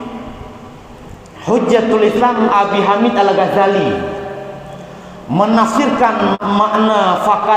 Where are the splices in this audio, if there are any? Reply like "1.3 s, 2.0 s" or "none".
6.4 s